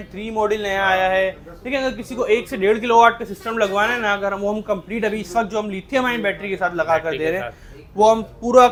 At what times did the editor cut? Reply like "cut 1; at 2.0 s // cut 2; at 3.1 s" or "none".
none